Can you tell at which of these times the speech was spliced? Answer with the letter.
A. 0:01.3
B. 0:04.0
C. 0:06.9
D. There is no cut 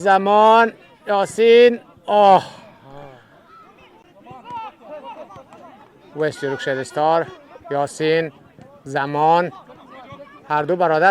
B